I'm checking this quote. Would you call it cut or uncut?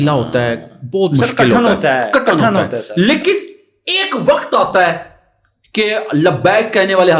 uncut